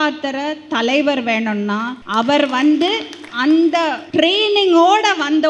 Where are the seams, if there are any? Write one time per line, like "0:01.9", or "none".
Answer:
0:02.0
0:03.2
0:04.0